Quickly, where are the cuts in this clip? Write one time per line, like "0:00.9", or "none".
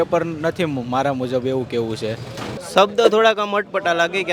0:02.6

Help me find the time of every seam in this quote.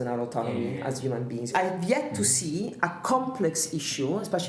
0:01.5

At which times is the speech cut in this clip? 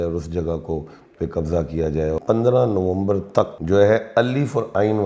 0:02.2
0:03.6

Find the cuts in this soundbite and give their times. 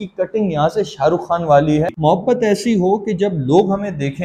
0:01.9

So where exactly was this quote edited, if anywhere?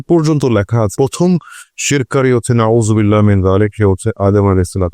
none

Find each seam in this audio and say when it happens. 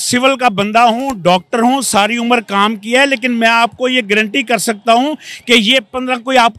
none

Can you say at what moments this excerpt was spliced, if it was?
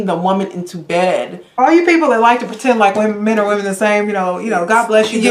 0:01.6

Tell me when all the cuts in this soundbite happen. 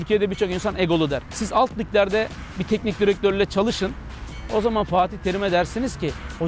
0:01.3

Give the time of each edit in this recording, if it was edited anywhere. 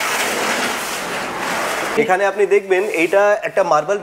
0:02.0

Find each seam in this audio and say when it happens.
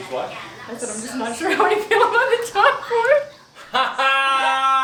none

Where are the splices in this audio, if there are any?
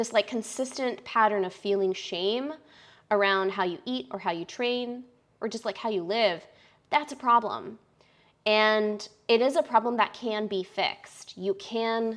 none

